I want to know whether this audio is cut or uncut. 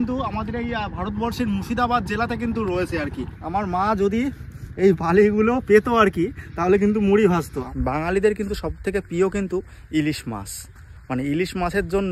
cut